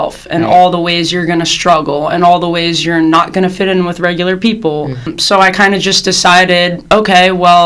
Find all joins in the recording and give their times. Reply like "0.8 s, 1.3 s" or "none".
5.1 s